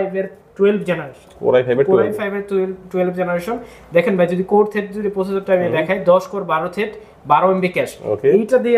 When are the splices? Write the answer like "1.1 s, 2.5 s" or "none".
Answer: none